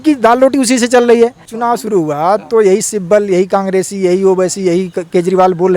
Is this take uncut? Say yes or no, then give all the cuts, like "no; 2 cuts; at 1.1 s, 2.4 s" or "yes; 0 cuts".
no; 1 cut; at 1.5 s